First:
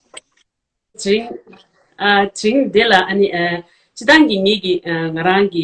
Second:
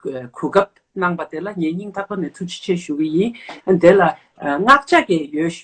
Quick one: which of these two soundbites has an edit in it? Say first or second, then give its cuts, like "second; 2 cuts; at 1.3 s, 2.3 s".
first; 1 cut; at 1.0 s